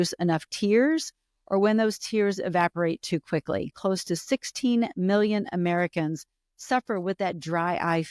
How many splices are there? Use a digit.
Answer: 1